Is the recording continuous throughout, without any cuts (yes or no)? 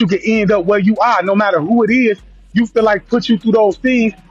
yes